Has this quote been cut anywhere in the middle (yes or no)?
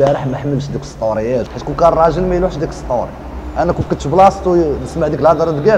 yes